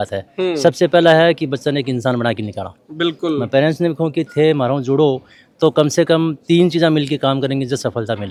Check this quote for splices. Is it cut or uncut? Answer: uncut